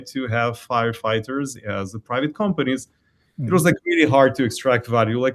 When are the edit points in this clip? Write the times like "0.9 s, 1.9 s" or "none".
2.5 s